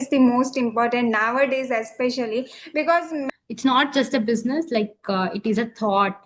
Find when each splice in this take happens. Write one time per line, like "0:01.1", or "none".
0:03.3